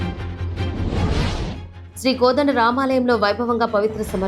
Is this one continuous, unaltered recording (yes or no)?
yes